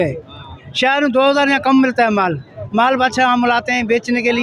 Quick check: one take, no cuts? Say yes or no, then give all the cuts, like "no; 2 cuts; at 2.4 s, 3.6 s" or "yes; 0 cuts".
yes; 0 cuts